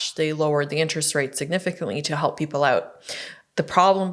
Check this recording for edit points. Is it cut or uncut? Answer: uncut